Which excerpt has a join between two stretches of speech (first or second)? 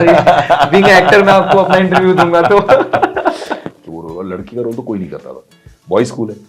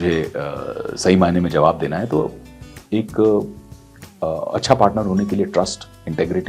first